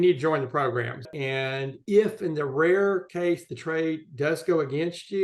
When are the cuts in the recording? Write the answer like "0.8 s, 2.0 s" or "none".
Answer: 1.0 s